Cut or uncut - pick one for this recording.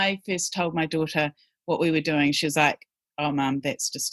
uncut